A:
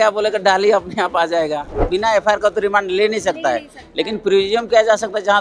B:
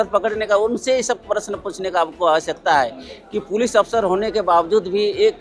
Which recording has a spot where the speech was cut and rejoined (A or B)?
A